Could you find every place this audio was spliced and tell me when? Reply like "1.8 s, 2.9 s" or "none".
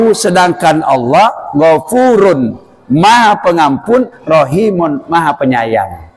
none